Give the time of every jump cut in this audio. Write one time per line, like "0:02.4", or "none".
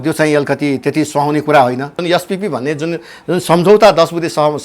0:02.0